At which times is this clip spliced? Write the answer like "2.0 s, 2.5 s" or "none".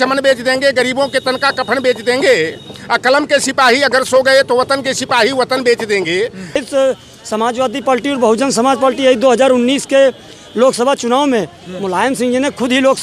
6.6 s